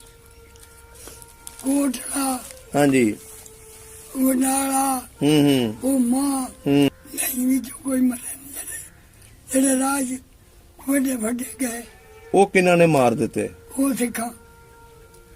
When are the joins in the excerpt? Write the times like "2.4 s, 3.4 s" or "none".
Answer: 6.9 s